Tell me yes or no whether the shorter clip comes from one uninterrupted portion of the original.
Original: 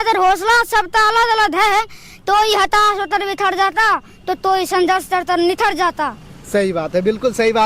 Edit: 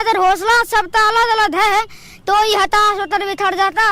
yes